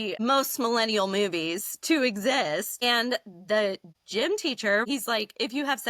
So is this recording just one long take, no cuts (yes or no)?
no